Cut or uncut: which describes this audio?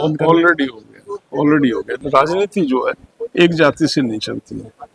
cut